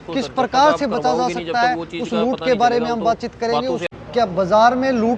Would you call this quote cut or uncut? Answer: cut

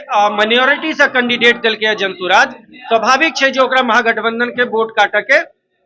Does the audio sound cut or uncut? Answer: uncut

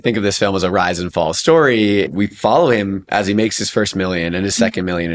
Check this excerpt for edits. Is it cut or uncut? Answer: cut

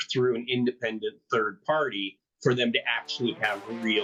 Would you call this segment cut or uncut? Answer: uncut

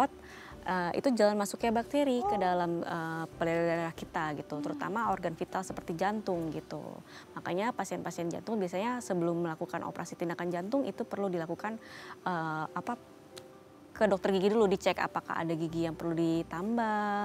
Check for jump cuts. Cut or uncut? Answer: uncut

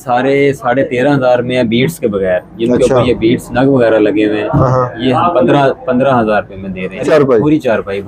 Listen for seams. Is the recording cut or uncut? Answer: uncut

